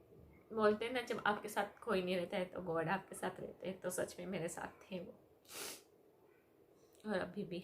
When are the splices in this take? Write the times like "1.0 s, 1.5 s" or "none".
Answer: none